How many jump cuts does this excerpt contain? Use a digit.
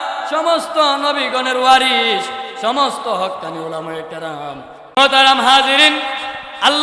1